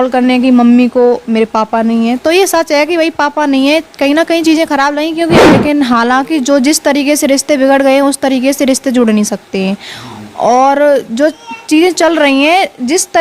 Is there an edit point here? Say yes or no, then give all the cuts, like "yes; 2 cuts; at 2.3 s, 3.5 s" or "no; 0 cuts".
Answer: yes; 1 cut; at 5.5 s